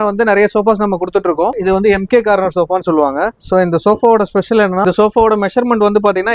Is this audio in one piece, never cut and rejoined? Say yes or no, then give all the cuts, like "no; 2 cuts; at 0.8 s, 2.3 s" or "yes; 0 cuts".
no; 2 cuts; at 1.6 s, 4.8 s